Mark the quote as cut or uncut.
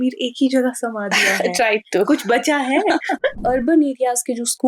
cut